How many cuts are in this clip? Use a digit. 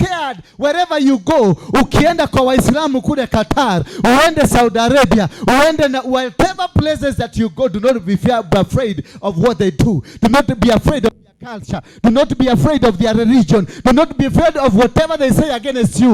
0